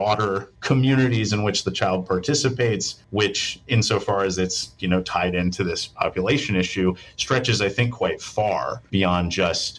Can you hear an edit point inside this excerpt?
no; 0 cuts

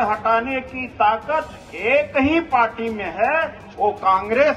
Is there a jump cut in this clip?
no; 0 cuts

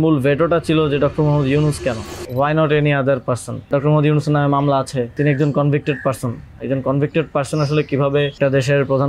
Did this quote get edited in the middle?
yes; 4 cuts; at 2.2 s, 3.7 s, 5.1 s, 8.4 s

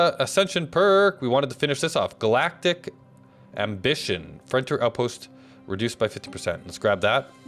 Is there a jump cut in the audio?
no; 0 cuts

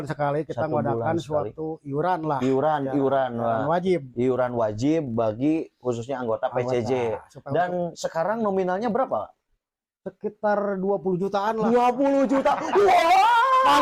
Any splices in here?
no; 0 cuts

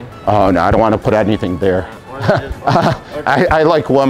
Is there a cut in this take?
no; 0 cuts

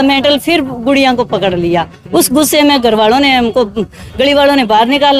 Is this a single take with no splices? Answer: yes; 0 cuts

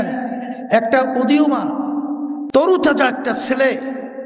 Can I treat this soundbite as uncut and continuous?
yes; 0 cuts

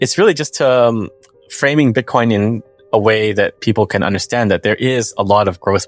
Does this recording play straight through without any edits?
yes; 0 cuts

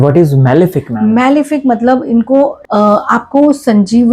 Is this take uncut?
no; 1 cut; at 2.6 s

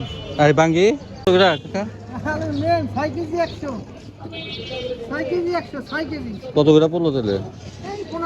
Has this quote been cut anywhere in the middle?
yes; 1 cut; at 1.3 s

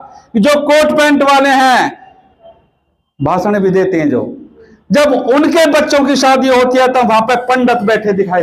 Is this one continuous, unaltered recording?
yes; 0 cuts

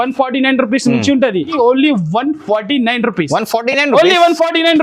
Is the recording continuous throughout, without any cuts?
no; 1 cut; at 1.5 s

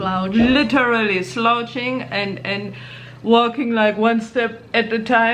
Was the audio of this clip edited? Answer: no; 0 cuts

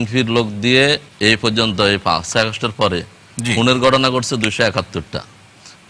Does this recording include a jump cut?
yes; 1 cut; at 1.1 s

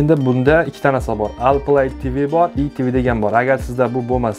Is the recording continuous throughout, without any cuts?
no; 1 cut; at 2.5 s

